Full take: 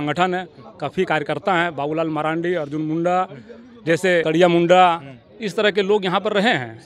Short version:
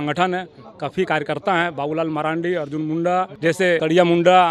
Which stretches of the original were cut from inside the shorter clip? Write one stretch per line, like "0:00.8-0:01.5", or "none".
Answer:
0:03.3-0:03.8